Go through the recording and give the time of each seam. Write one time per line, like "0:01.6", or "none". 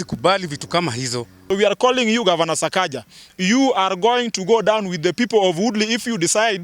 0:01.3